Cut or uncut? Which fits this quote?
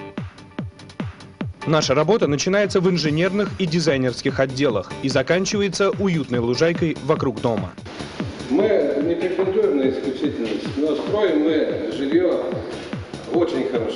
cut